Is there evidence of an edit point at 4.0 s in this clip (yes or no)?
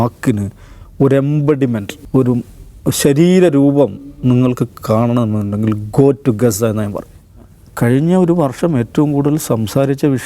no